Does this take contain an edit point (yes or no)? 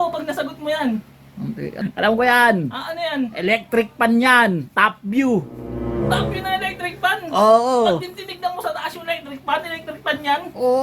yes